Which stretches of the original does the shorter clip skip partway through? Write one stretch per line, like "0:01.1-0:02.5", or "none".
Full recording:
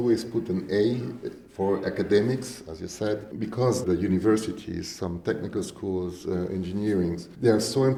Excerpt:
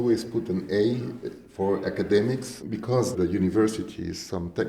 0:02.6-0:03.3